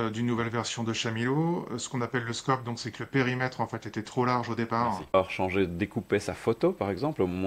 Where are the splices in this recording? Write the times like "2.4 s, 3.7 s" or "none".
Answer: 5.1 s